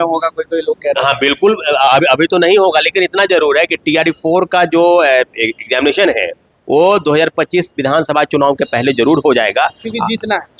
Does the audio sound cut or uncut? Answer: uncut